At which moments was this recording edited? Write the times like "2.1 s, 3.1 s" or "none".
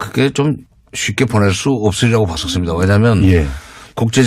none